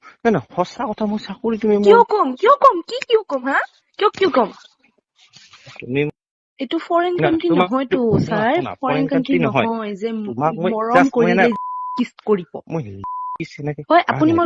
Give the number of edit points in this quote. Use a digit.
1